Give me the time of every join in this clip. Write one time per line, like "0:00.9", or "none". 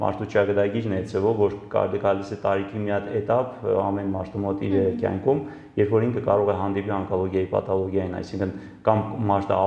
none